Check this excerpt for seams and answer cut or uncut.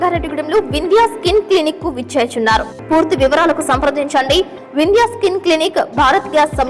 cut